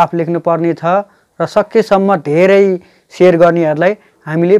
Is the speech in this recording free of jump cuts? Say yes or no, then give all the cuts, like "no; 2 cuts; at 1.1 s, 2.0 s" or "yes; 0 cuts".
yes; 0 cuts